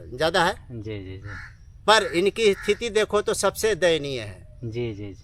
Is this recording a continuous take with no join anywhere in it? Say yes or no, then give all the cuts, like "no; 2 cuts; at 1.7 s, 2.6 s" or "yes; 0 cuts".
yes; 0 cuts